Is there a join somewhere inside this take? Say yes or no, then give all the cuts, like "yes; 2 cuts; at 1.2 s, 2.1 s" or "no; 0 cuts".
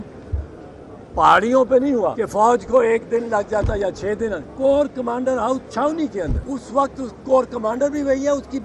yes; 3 cuts; at 2.0 s, 4.5 s, 6.4 s